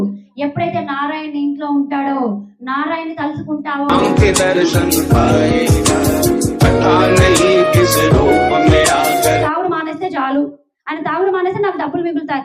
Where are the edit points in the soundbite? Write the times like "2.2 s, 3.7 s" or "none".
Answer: 9.5 s